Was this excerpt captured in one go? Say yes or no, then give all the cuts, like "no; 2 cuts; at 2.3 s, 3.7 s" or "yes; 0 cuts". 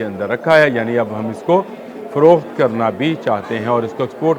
yes; 0 cuts